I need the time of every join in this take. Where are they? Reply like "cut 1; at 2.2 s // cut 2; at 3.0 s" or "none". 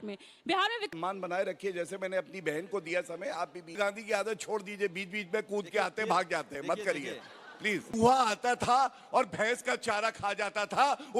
cut 1; at 0.9 s // cut 2; at 3.8 s // cut 3; at 7.9 s

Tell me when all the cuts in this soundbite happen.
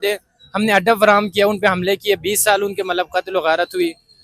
none

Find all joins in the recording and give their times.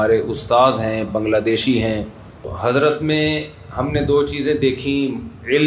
cut 1; at 2.5 s

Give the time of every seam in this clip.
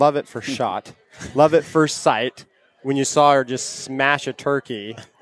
none

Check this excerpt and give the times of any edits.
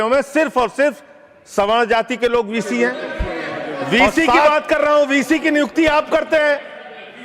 cut 1; at 3.0 s

